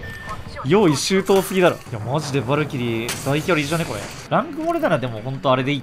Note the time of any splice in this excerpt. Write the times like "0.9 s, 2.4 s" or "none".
1.9 s, 4.1 s